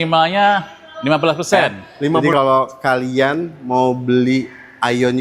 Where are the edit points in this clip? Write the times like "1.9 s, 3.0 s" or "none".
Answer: 2.2 s

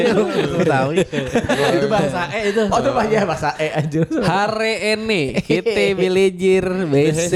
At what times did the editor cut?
none

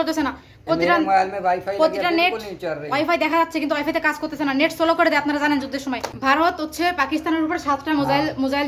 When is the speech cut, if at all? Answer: 6.1 s

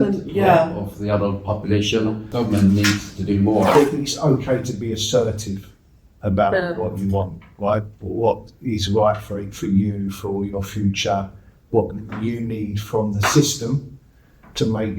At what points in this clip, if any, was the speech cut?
2.2 s, 3.7 s

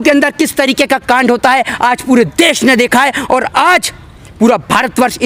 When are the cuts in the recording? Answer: none

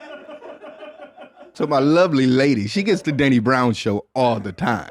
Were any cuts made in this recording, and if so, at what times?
1.5 s

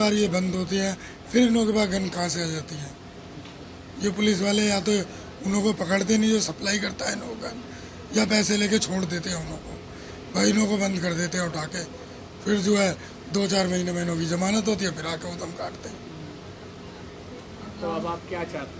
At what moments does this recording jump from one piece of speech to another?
none

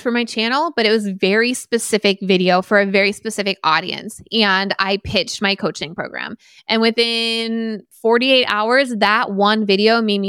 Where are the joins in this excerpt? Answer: none

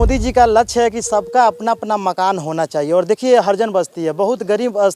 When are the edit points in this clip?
none

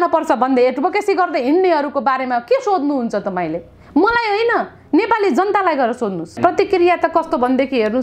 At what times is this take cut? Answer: 6.4 s

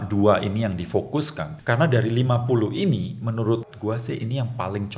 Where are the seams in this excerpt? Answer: 1.5 s, 3.7 s

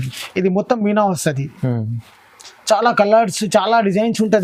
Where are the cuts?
none

